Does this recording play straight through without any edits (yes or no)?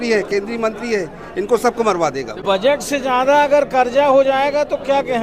no